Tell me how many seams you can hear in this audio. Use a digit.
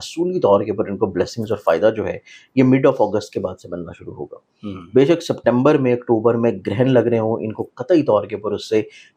0